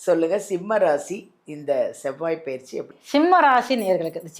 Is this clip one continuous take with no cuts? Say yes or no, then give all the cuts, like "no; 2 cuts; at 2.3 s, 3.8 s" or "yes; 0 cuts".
no; 1 cut; at 3.0 s